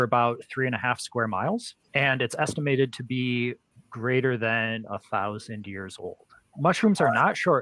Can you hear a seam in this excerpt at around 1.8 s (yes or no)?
yes